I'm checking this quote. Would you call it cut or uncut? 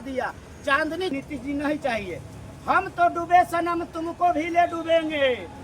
cut